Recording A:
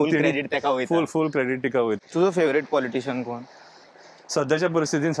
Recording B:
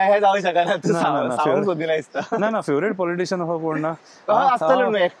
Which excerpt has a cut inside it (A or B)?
A